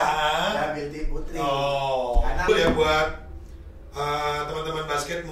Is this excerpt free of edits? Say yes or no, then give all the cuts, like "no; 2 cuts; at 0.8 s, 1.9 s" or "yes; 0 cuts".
no; 1 cut; at 2.5 s